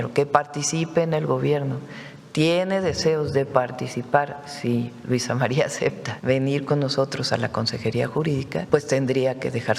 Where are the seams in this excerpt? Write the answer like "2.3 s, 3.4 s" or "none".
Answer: 6.1 s, 8.6 s